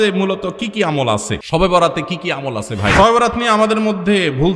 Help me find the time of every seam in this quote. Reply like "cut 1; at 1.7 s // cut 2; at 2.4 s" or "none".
cut 1; at 1.4 s // cut 2; at 2.9 s